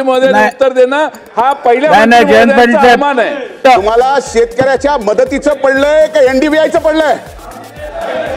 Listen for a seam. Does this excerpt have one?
yes; 1 cut; at 3.6 s

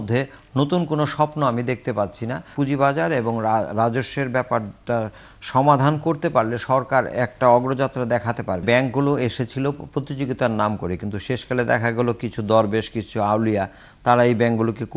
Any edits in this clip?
yes; 2 cuts; at 2.5 s, 8.6 s

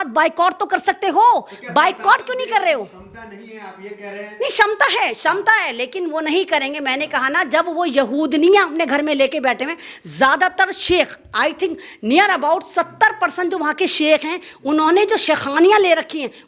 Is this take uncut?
yes; 0 cuts

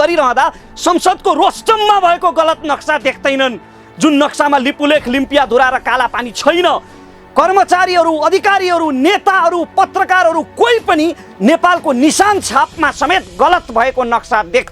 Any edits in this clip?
no; 0 cuts

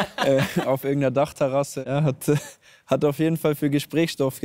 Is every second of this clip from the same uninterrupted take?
no; 1 cut; at 1.8 s

